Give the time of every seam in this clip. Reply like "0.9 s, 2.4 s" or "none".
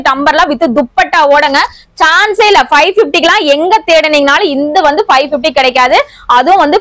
none